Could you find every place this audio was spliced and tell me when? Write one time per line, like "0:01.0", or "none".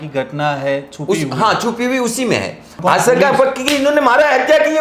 0:02.8